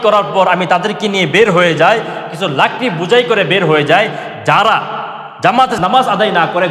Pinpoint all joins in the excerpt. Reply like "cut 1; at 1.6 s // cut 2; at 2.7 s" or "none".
cut 1; at 5.8 s